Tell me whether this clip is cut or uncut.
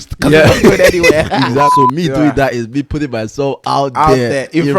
cut